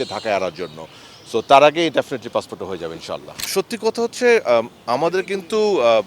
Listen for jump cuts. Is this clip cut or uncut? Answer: cut